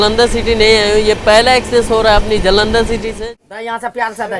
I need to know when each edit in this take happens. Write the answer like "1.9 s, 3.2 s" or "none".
3.1 s